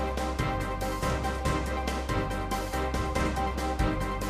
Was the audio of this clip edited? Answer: no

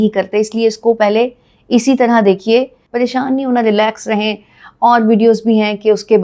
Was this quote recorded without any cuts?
no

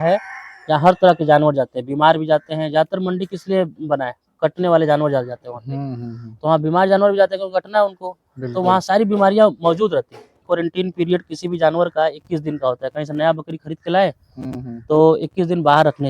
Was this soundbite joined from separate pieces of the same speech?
yes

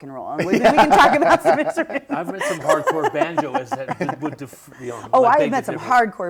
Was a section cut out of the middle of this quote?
no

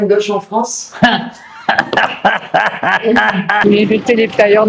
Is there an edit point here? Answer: yes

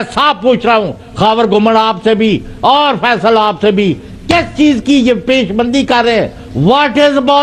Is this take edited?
no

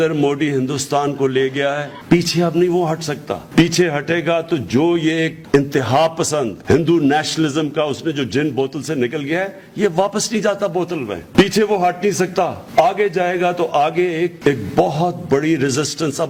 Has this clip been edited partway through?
no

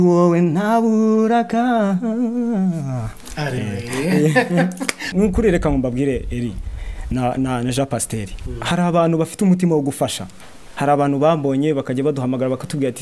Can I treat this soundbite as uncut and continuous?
no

